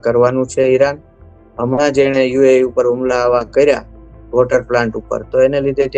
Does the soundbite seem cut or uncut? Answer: uncut